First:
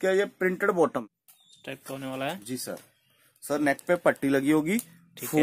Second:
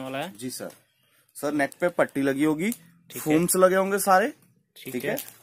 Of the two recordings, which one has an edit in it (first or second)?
first